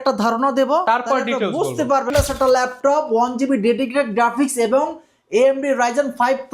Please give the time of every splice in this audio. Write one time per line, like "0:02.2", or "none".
0:02.1